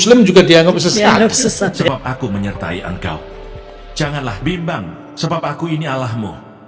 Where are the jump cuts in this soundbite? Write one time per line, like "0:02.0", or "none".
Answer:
0:01.9